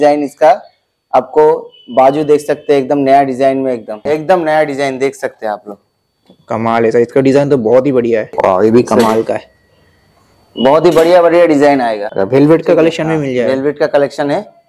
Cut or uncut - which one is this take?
cut